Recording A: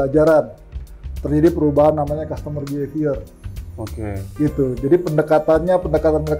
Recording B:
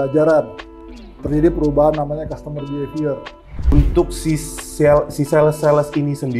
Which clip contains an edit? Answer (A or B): B